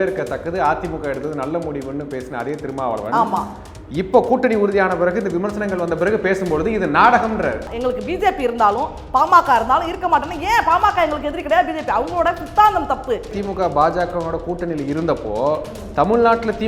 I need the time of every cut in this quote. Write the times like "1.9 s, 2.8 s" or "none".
7.7 s, 13.4 s